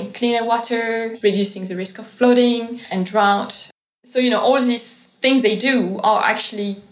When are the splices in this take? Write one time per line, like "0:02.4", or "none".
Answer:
0:01.1
0:02.8
0:03.7